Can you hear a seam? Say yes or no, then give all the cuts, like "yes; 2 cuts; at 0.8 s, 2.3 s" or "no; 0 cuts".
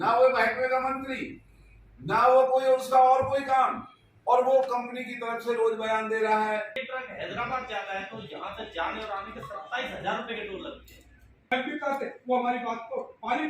yes; 2 cuts; at 6.8 s, 11.3 s